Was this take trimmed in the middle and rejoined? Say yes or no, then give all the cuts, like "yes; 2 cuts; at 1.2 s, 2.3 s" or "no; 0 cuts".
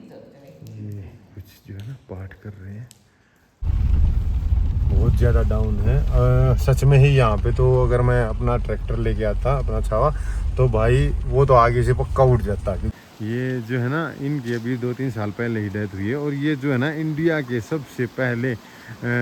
yes; 2 cuts; at 3.6 s, 12.9 s